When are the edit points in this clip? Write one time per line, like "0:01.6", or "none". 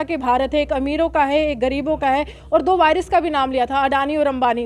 none